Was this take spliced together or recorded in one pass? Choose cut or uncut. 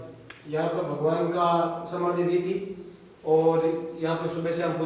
uncut